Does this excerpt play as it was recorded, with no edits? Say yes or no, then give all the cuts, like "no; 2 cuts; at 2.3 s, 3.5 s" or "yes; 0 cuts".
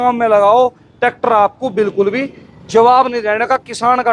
yes; 0 cuts